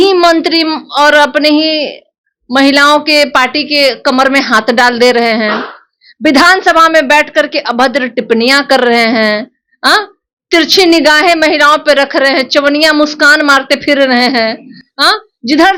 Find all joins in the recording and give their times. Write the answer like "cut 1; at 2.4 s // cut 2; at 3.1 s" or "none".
none

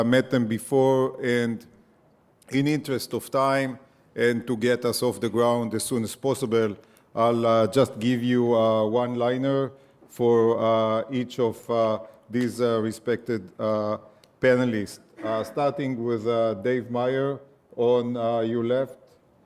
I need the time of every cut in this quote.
cut 1; at 1.6 s

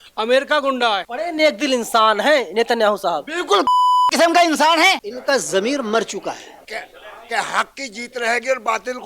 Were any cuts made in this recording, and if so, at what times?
cut 1; at 1.1 s // cut 2; at 5.1 s // cut 3; at 6.7 s

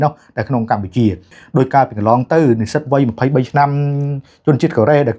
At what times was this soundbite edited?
cut 1; at 1.3 s

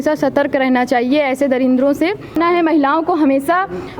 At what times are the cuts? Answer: cut 1; at 2.4 s

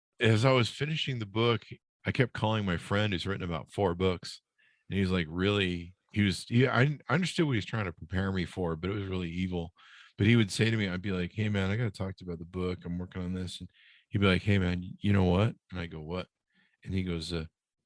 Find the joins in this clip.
cut 1; at 1.7 s

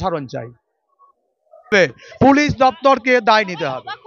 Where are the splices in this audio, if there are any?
none

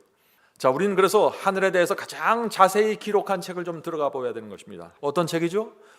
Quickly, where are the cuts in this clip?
cut 1; at 4.9 s

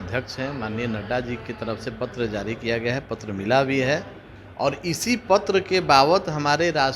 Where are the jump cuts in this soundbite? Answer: none

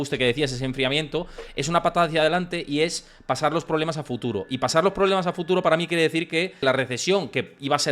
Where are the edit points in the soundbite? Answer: cut 1; at 6.6 s

